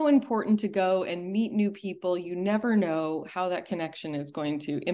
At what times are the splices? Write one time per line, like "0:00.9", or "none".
none